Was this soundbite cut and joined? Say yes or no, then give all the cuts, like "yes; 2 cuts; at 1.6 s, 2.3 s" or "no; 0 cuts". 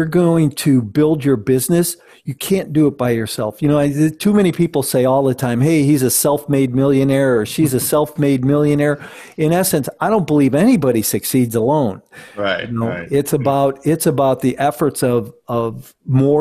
no; 0 cuts